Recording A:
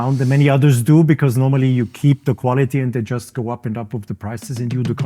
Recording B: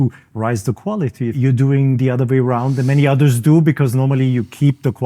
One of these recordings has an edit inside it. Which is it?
B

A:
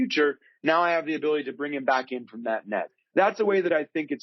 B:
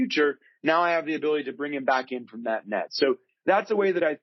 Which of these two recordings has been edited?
A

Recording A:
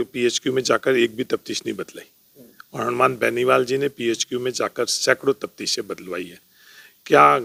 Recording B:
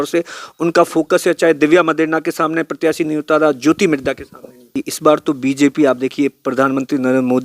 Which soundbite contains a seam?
B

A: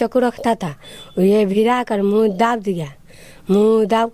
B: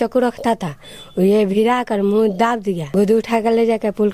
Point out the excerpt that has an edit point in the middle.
B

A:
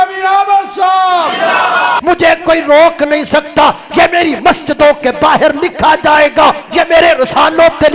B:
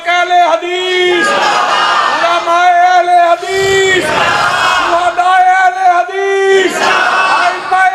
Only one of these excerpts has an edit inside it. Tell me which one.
A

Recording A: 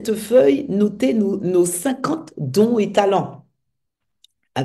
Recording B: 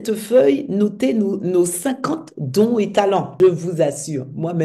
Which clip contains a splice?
B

